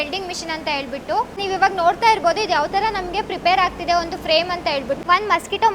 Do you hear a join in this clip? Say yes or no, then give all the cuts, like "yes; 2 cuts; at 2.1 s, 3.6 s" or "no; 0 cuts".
yes; 2 cuts; at 1.4 s, 5.0 s